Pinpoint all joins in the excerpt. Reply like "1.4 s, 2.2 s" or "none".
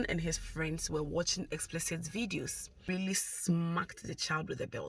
2.9 s